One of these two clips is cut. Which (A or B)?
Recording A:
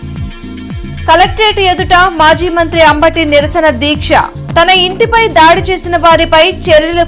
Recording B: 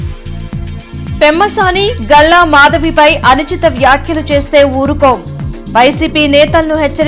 B